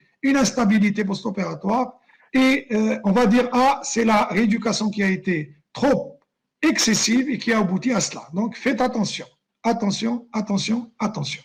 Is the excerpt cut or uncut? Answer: uncut